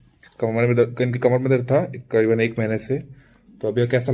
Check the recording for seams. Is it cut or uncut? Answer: uncut